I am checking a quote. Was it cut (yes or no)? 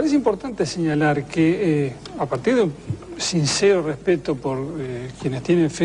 yes